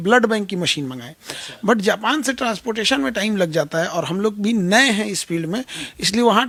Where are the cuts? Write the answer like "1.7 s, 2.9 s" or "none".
none